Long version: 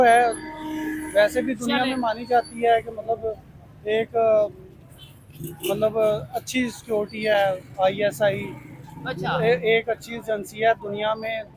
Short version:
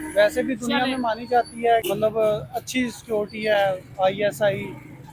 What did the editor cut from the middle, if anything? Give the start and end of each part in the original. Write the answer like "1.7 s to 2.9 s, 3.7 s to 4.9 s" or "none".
2.8 s to 5.6 s